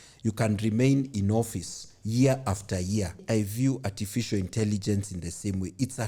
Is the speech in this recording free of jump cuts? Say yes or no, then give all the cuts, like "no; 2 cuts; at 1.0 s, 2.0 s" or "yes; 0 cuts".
no; 1 cut; at 3.2 s